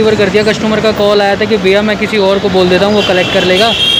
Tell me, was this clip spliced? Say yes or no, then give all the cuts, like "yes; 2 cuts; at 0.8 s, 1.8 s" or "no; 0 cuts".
no; 0 cuts